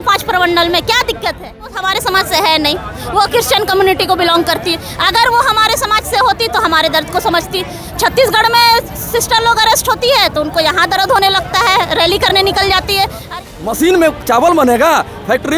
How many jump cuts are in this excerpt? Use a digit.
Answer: 2